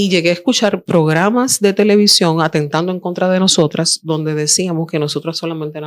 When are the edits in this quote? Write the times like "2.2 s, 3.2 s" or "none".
none

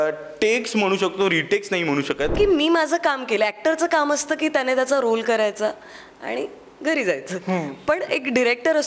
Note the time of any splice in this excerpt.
2.3 s

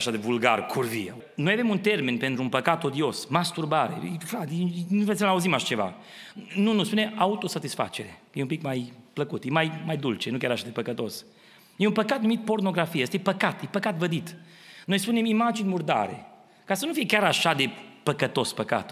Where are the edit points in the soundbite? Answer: 1.2 s

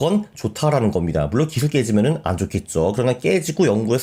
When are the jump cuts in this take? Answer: none

